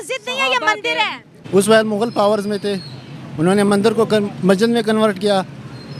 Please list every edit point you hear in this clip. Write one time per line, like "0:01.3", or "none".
0:01.3